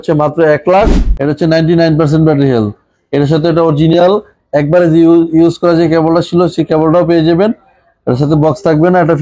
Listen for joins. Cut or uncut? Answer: cut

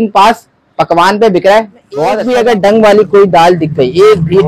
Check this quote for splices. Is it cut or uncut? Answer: cut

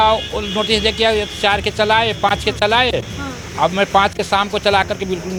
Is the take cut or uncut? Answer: uncut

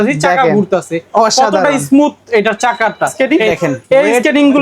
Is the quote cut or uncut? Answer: cut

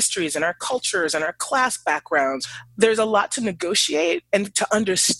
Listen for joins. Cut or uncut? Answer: cut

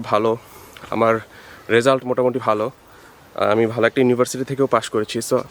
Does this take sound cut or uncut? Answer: uncut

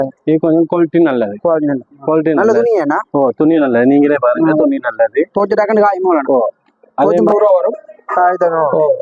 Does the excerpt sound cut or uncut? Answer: cut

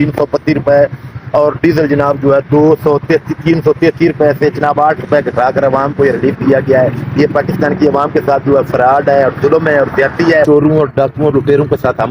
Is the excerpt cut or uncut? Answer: cut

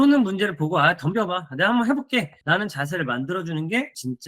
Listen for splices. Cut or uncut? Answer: uncut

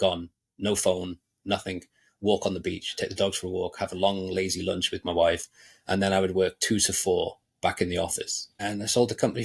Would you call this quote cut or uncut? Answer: cut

